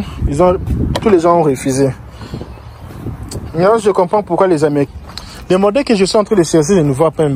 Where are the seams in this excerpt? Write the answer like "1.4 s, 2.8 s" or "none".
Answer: 4.9 s